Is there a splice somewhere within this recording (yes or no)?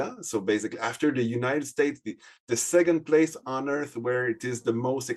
no